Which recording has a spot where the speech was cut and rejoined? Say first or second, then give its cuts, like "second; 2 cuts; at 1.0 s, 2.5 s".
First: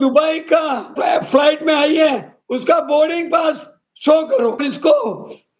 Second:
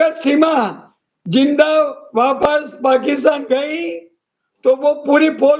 first; 2 cuts; at 0.9 s, 4.6 s